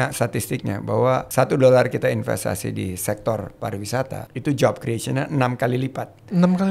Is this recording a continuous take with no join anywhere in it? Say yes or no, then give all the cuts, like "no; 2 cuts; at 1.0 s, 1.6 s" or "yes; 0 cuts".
no; 2 cuts; at 1.3 s, 4.2 s